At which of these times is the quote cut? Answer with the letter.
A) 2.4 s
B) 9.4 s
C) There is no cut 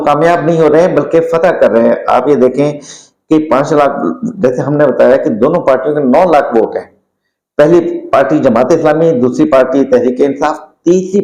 C